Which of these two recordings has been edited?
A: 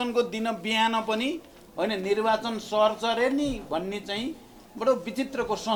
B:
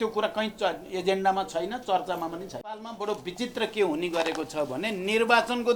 B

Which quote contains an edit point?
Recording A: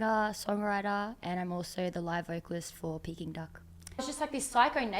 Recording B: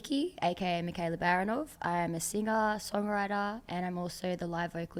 A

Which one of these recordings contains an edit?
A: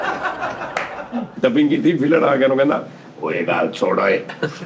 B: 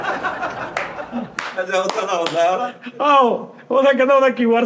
A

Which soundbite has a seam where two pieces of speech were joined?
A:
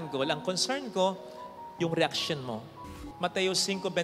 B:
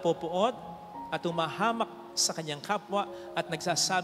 A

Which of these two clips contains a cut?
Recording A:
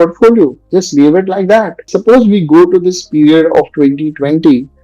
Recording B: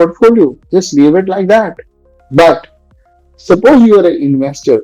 A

